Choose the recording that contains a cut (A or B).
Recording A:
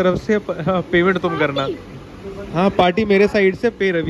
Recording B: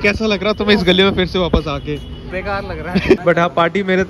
B